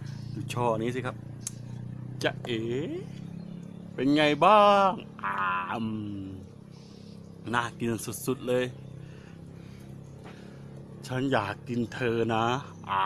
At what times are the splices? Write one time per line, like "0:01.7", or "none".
none

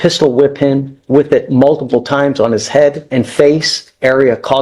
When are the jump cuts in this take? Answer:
0:03.0

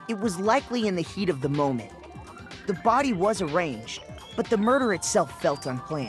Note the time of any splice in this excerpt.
none

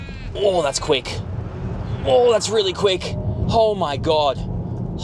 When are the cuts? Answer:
0:03.4

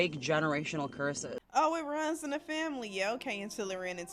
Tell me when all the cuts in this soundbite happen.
0:01.3

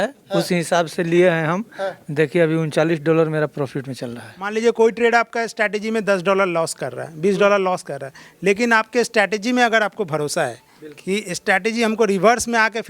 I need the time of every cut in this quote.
0:04.5

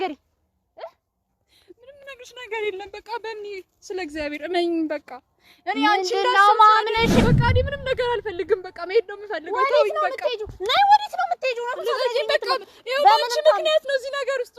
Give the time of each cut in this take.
0:07.2

